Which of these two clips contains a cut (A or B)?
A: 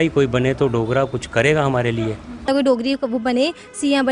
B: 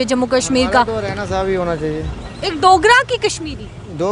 A